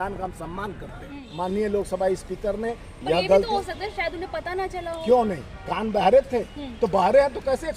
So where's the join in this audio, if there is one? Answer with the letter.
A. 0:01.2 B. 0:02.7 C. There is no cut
A